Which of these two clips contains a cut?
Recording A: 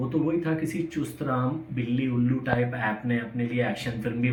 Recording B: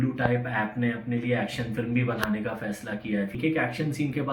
B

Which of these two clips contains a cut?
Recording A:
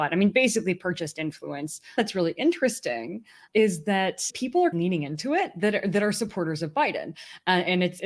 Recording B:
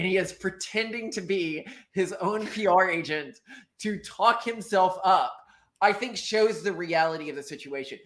A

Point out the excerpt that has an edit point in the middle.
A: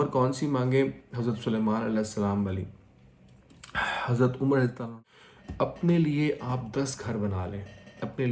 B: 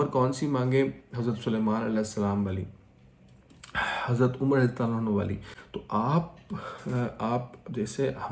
A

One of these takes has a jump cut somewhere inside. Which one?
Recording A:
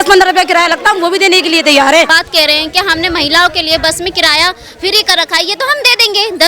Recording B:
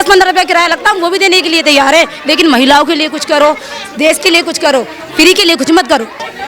A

